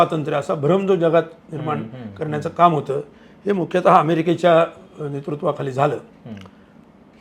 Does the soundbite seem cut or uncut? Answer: uncut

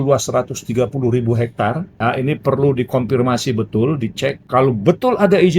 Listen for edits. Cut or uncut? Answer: cut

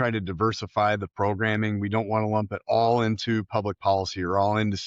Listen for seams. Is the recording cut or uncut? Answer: uncut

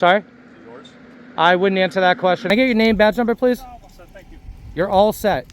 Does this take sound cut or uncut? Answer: cut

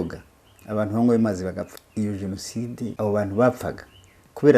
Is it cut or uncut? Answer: cut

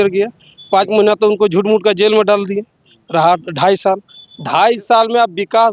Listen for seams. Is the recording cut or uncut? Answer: uncut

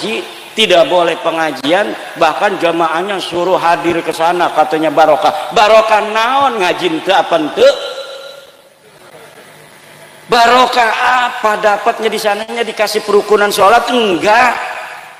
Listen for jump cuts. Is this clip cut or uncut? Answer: uncut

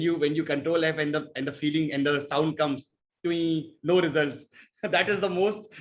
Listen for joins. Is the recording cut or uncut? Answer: uncut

